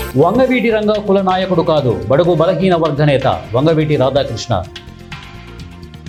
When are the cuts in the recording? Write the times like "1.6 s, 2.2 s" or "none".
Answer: none

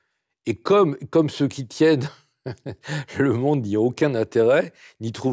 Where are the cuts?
none

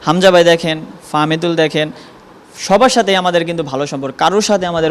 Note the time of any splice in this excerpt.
none

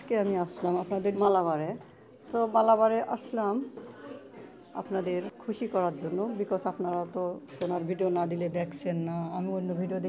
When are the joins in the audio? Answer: 1.1 s, 5.3 s

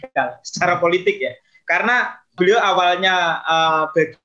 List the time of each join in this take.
2.3 s

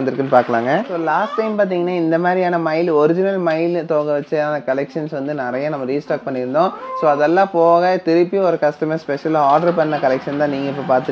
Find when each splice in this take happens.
0.9 s

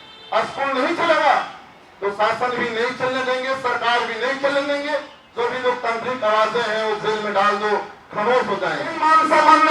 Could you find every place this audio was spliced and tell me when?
5.2 s, 9.0 s

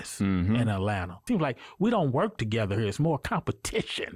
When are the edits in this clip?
1.2 s

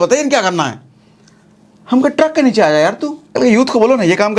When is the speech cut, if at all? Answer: 3.3 s

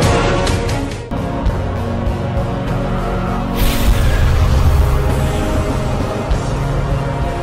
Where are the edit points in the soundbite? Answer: none

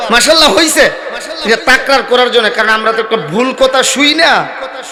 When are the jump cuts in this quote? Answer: none

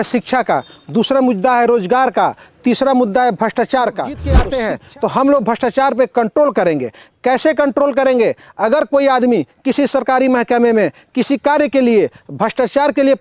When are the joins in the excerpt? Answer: 4.3 s

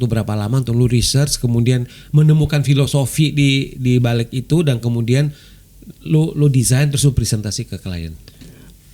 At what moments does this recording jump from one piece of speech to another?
none

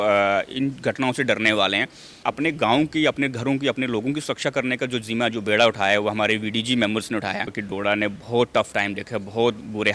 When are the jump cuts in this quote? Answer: 2.2 s, 7.6 s

